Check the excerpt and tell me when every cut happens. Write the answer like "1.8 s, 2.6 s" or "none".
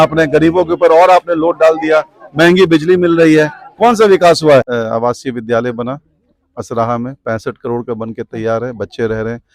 4.8 s

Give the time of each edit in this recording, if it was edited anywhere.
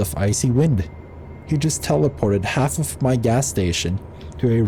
none

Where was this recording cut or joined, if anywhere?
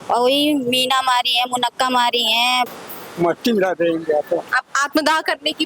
2.7 s

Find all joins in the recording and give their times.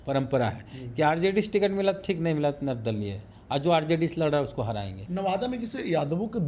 4.9 s

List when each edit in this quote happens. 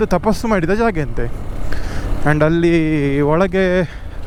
none

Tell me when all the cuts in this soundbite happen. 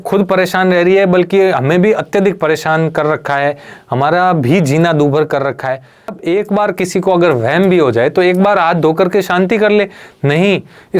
6.2 s

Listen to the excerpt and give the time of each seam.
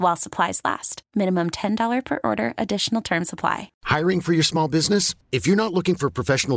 3.7 s

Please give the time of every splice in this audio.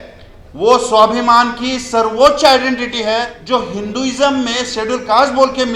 3.3 s

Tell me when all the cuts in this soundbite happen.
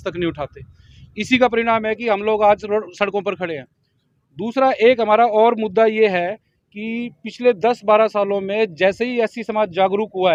none

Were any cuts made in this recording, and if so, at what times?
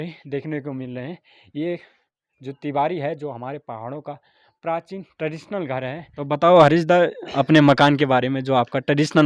6.2 s

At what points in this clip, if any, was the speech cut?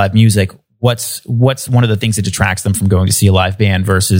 none

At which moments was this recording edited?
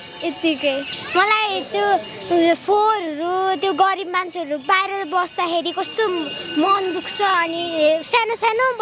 none

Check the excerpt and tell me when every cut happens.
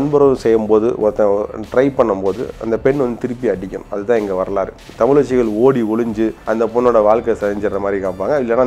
4.8 s, 6.4 s

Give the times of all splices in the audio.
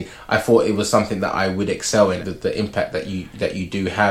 2.2 s

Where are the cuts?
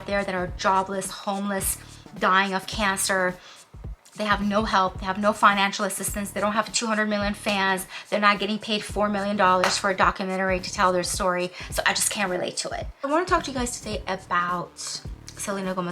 13.0 s

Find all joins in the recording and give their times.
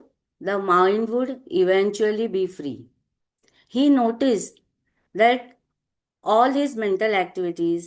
none

